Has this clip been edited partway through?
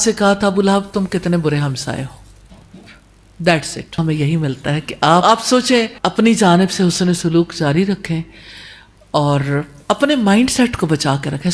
yes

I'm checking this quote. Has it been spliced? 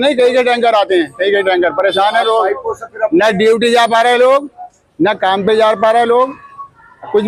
no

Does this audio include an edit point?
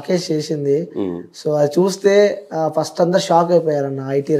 no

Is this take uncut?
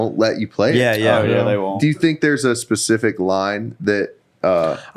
no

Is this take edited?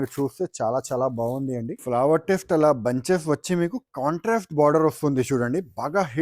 yes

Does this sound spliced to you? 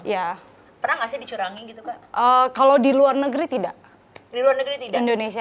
no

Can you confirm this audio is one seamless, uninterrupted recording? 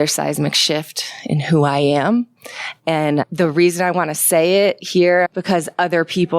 no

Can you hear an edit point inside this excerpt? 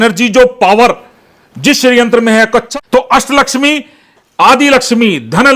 yes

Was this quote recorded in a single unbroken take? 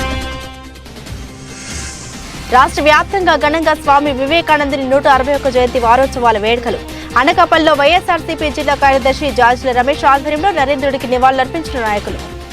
yes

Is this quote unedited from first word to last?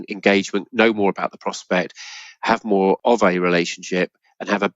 no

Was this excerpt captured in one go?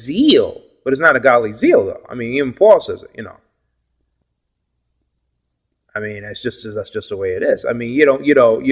yes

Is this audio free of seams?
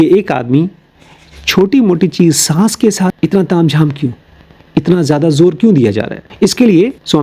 no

